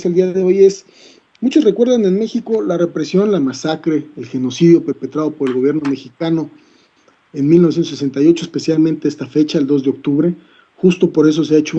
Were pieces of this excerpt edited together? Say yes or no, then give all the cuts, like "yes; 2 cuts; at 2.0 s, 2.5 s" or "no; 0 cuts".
no; 0 cuts